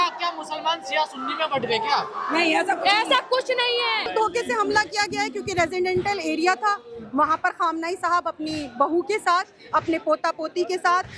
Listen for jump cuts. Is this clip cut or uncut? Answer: cut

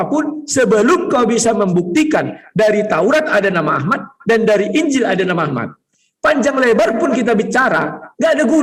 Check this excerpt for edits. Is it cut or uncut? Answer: uncut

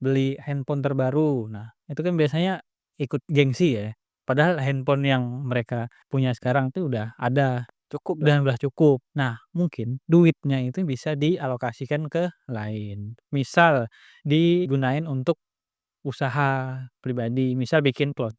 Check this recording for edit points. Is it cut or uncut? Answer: uncut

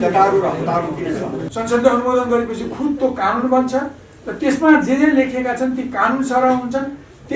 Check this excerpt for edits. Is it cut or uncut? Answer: cut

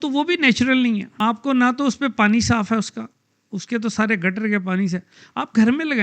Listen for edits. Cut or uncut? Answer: cut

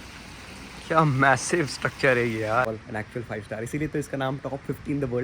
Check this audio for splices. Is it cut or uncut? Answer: cut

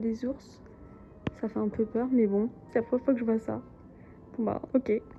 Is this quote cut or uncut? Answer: uncut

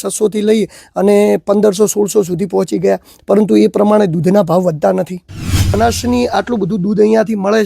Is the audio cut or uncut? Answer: cut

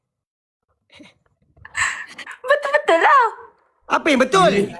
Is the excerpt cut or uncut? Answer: uncut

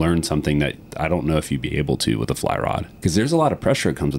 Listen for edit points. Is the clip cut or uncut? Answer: cut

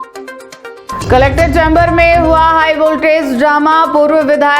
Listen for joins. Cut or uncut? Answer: cut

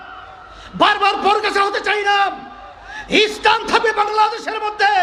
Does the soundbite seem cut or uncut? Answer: uncut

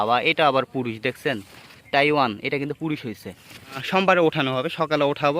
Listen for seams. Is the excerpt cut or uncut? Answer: cut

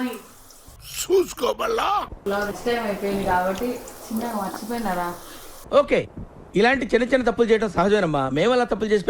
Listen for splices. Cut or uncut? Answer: cut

